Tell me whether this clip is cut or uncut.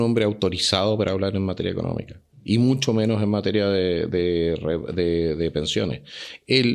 uncut